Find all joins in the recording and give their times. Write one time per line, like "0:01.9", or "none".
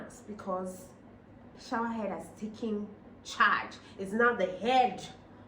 0:01.6